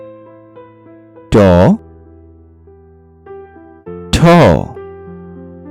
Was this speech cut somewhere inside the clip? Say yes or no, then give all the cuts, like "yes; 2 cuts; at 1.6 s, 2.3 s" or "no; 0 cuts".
yes; 4 cuts; at 1.0 s, 1.8 s, 4.0 s, 4.7 s